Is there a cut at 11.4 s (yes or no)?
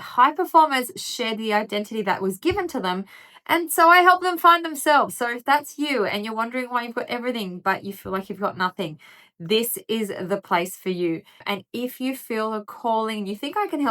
yes